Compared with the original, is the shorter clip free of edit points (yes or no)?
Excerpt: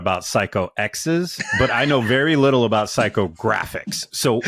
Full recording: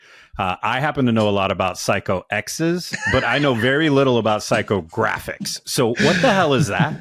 yes